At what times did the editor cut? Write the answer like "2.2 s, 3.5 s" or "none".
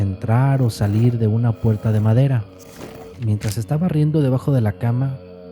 3.2 s